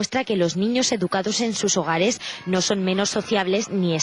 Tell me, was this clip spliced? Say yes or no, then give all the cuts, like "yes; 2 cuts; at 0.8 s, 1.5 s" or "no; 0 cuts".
no; 0 cuts